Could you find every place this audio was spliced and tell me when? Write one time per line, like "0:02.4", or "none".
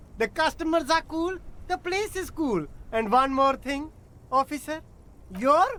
none